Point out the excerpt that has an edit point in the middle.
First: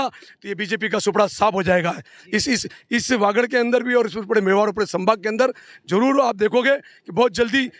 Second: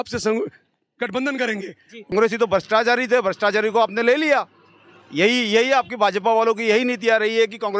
second; 1 cut; at 2.1 s

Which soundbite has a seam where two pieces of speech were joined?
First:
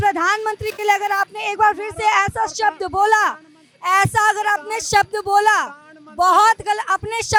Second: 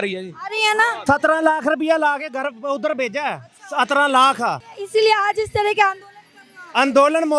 second; 2 cuts; at 1.0 s, 4.7 s

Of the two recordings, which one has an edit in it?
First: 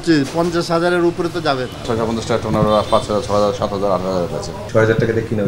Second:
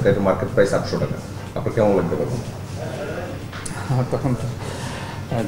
first; 2 cuts; at 1.8 s, 4.5 s

